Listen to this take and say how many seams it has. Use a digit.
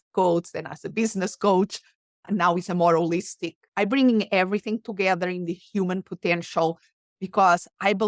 1